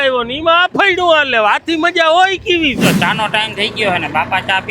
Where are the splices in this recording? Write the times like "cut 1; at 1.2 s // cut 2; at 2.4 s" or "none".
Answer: cut 1; at 2.8 s